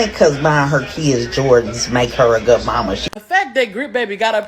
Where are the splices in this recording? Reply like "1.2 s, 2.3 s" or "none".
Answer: 3.1 s